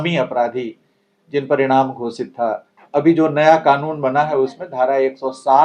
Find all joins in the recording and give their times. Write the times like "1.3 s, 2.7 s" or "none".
2.7 s